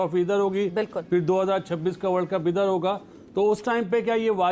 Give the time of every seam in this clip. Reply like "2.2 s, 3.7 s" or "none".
none